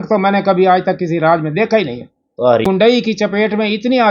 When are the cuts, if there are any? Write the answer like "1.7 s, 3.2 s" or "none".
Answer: 2.6 s